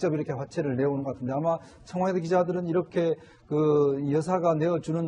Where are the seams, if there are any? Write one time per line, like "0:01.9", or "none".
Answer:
0:04.1

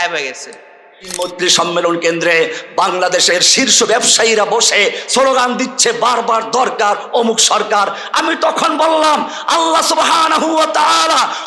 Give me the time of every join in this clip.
0:01.1

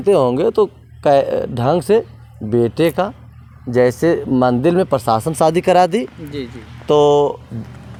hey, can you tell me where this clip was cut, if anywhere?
none

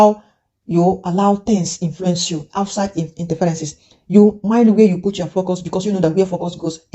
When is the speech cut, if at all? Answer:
none

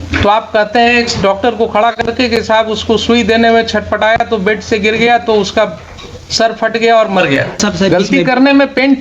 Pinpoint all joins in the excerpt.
0:07.6

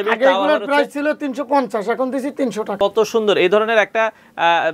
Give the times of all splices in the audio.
0:02.7

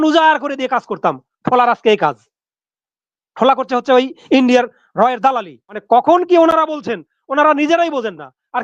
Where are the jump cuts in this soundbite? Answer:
0:05.8

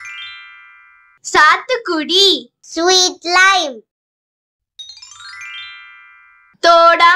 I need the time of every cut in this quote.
0:01.0

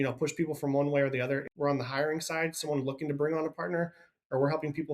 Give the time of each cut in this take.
0:01.5

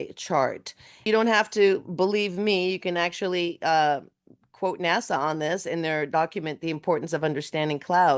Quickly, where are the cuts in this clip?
0:01.0

